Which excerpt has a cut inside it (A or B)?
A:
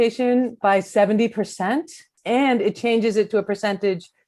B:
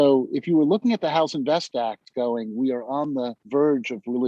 A